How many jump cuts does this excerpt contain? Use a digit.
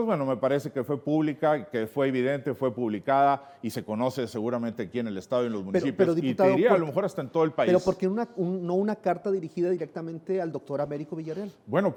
0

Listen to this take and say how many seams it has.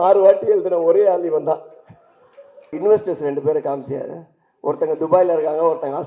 1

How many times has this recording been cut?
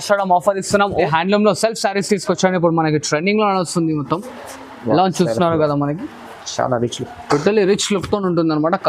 1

